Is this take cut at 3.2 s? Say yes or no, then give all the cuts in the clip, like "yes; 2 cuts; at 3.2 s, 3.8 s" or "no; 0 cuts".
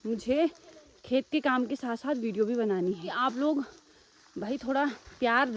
yes; 1 cut; at 3.2 s